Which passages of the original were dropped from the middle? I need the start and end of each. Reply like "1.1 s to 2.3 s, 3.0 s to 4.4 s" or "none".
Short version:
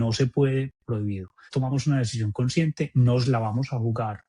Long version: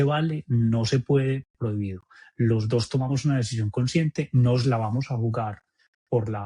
2.2 s to 2.9 s